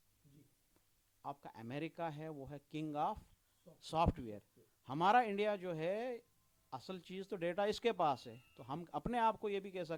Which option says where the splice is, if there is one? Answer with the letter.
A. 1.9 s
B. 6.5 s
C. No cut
C